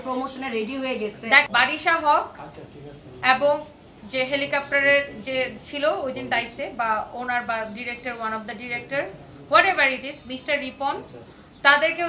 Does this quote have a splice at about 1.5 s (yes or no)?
yes